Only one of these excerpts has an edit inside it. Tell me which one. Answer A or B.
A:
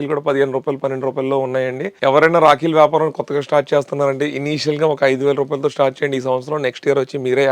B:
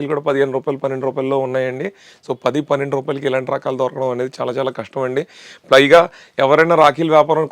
A